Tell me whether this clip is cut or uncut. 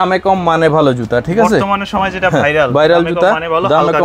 uncut